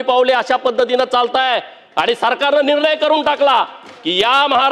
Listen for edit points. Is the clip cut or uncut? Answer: uncut